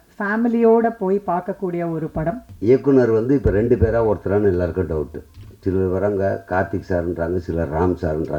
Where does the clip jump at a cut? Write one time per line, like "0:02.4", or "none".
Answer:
0:02.5

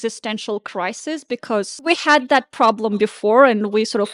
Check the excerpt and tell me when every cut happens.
0:01.9

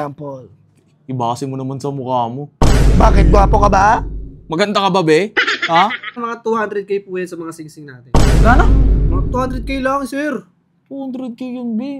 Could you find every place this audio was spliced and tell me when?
0:06.2

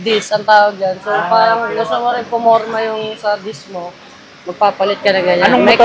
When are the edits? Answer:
none

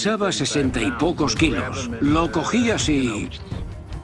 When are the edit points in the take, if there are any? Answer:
none

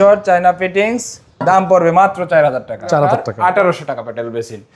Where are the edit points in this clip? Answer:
0:03.3

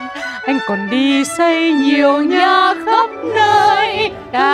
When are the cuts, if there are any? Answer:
none

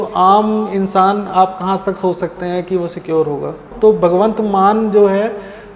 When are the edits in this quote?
0:03.7

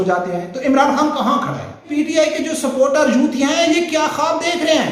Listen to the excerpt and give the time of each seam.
0:01.9

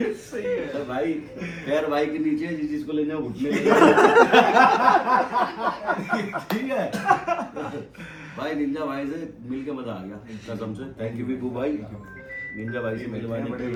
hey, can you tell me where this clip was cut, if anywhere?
none

